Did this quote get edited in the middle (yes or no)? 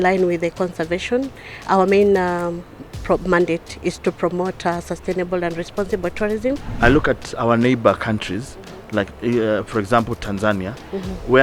yes